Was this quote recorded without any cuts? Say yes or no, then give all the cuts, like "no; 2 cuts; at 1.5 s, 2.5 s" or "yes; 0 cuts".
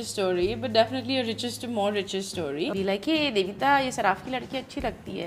no; 1 cut; at 2.7 s